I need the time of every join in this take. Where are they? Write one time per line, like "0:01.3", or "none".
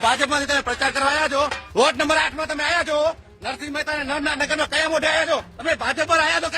0:01.6
0:05.5